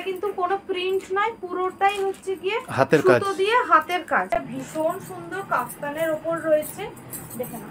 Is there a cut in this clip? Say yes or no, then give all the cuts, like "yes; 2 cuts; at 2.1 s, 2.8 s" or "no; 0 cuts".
yes; 1 cut; at 4.3 s